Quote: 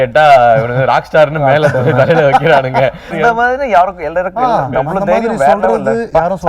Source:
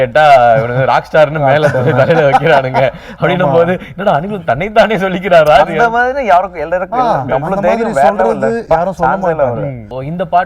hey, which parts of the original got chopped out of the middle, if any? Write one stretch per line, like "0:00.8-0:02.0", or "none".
0:03.1-0:05.7